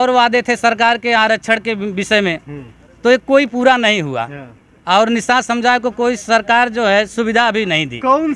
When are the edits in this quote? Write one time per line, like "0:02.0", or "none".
none